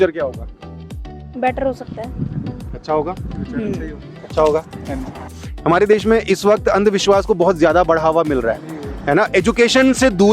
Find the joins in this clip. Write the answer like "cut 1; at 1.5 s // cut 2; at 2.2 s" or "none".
cut 1; at 5.2 s